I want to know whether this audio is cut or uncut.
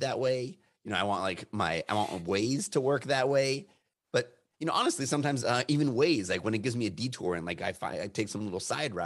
uncut